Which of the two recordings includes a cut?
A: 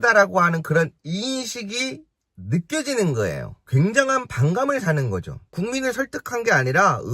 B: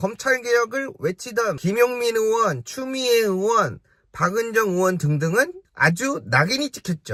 A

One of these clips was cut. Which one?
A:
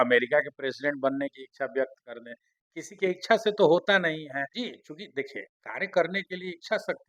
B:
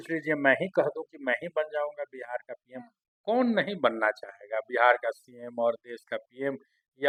A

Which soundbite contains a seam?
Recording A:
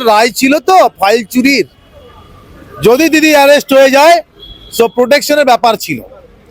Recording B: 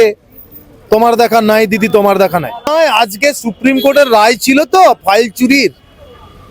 B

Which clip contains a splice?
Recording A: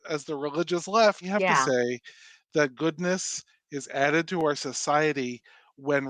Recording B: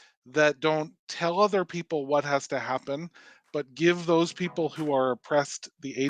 A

